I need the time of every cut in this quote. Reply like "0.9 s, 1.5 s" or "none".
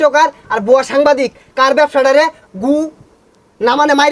none